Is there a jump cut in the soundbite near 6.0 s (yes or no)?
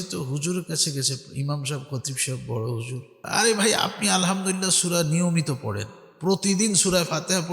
no